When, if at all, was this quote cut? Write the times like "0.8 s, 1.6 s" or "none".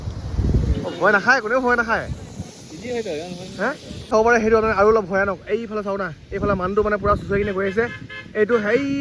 4.1 s